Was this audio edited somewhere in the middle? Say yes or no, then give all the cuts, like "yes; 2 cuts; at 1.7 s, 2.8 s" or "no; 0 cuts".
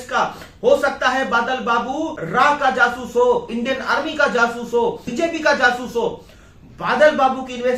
yes; 3 cuts; at 2.2 s, 3.5 s, 5.1 s